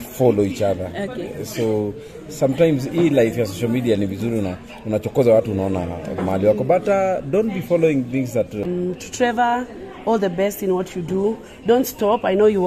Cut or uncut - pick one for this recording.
cut